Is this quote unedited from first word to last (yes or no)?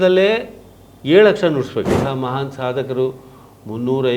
no